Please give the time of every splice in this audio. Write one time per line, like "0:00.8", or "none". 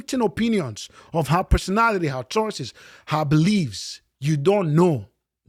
none